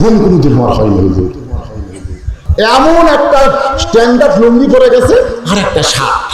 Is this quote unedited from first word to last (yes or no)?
no